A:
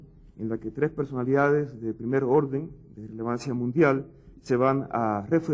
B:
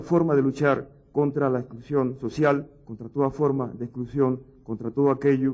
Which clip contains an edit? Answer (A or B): A